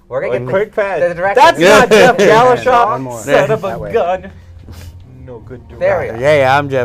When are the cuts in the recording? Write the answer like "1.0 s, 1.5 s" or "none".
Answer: 5.0 s